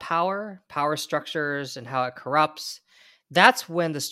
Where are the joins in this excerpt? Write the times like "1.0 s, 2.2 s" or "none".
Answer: none